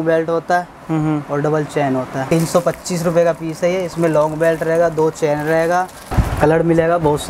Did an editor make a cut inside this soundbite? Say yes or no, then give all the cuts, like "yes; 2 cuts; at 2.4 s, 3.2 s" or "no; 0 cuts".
yes; 2 cuts; at 2.2 s, 6.1 s